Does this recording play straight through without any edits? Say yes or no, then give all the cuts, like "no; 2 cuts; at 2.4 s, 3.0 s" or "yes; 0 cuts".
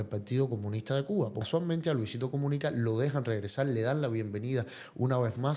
no; 1 cut; at 1.5 s